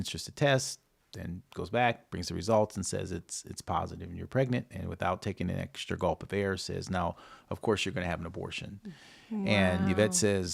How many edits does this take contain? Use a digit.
0